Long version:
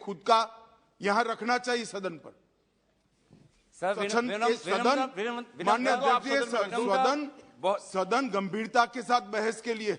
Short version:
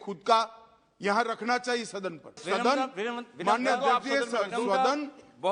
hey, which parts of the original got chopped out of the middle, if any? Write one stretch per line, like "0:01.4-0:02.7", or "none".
0:02.4-0:04.6